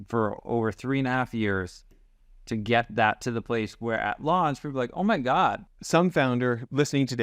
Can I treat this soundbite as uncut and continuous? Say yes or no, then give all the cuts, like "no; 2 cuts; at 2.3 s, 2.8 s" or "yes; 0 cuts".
no; 1 cut; at 5.7 s